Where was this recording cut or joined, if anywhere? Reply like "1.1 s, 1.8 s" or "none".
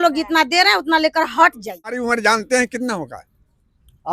2.0 s